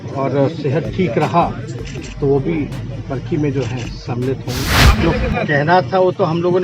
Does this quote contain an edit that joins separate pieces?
yes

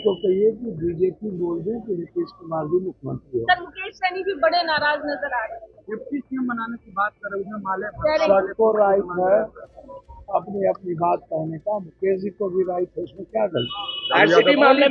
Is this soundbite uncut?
yes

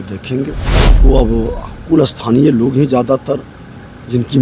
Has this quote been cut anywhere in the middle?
yes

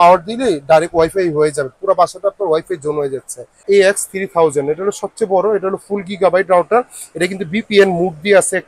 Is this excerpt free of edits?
no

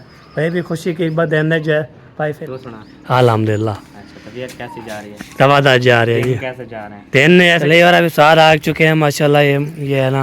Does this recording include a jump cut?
yes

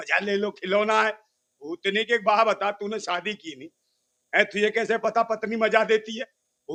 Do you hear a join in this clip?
no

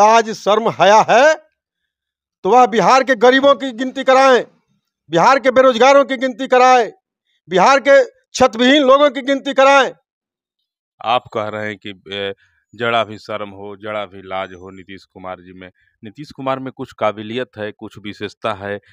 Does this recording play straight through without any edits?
yes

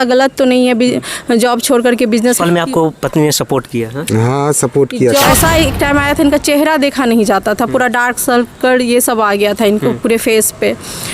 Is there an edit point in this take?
yes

